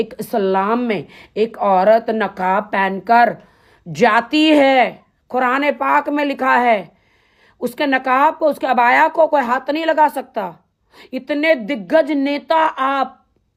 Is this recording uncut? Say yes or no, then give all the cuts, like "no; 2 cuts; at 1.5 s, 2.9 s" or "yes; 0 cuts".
yes; 0 cuts